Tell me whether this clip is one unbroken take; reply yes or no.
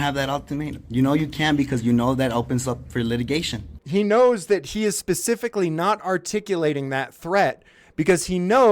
no